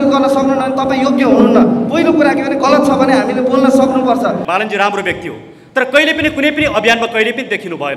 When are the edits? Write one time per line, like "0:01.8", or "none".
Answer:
0:04.4